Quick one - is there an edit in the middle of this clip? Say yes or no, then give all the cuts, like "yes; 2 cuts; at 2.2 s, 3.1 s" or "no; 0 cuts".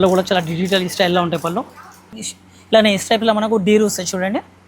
yes; 1 cut; at 2.2 s